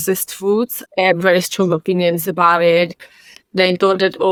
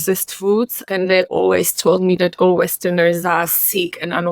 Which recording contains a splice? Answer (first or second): second